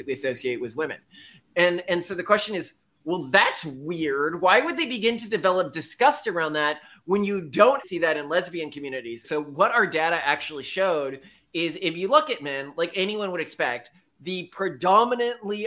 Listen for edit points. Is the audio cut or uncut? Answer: cut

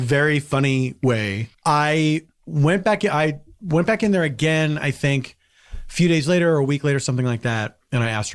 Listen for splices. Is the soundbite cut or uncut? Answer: cut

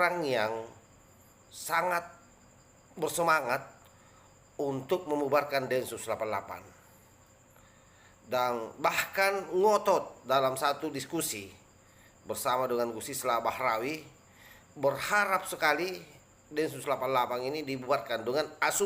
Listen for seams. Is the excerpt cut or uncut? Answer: uncut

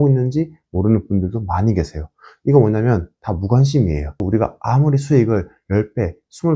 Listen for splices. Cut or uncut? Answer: cut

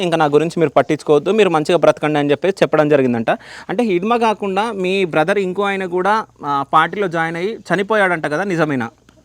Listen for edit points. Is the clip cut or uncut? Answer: uncut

